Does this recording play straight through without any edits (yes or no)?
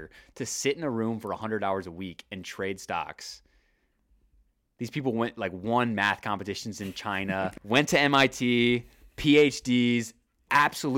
no